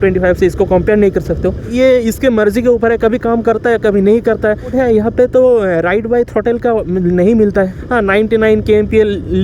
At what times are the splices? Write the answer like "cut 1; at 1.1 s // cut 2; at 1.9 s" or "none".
cut 1; at 1.7 s // cut 2; at 4.7 s // cut 3; at 7.7 s